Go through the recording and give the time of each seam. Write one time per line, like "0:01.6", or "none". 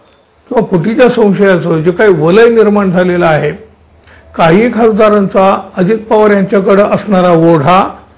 none

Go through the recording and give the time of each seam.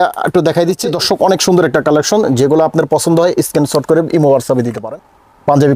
0:00.9
0:04.8

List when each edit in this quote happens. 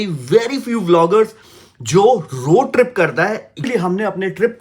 0:03.6

